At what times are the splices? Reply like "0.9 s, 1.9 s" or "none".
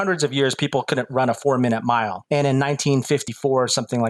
2.2 s, 3.3 s